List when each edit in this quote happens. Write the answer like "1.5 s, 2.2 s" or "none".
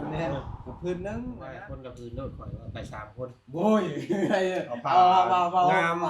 1.6 s